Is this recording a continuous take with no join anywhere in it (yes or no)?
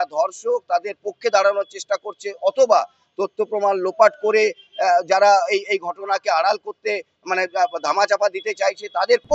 yes